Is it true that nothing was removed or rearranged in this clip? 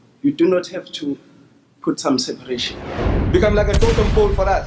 no; 1 cut; at 2.7 s

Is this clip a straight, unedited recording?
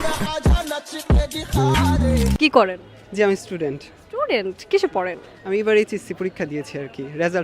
yes; 0 cuts

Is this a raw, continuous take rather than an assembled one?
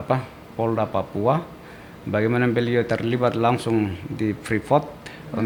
yes; 0 cuts

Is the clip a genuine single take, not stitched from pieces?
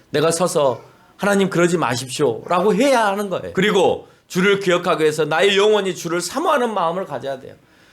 no; 1 cut; at 3.4 s

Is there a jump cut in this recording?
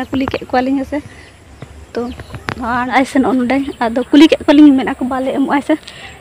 yes; 1 cut; at 3.0 s

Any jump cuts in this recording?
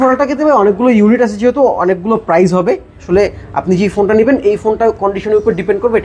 yes; 1 cut; at 2.9 s

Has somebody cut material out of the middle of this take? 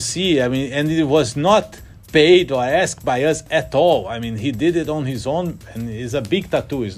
yes; 1 cut; at 5.6 s

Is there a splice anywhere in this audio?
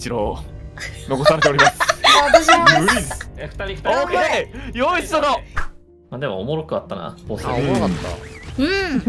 no; 0 cuts

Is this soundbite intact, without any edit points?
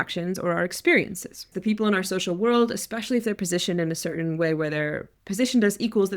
no; 1 cut; at 1.5 s

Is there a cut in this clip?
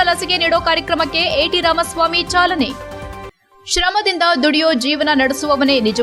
no; 0 cuts

